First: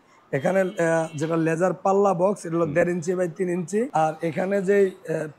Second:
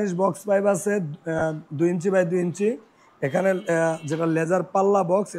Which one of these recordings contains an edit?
first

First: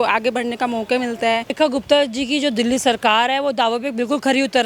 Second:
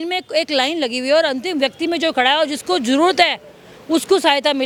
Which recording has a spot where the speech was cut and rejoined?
first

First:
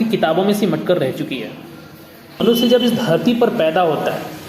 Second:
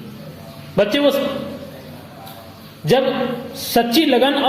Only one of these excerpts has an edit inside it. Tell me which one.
first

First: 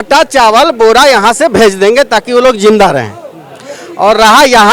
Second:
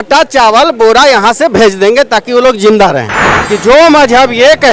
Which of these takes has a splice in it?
second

